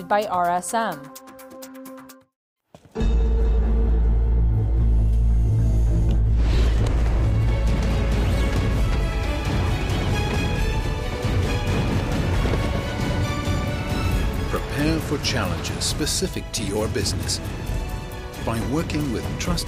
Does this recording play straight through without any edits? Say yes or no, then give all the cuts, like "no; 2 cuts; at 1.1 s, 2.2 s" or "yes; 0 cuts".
no; 2 cuts; at 1.0 s, 2.1 s